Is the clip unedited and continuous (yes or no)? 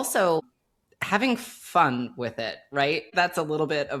no